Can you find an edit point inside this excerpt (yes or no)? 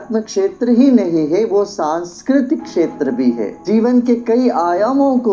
yes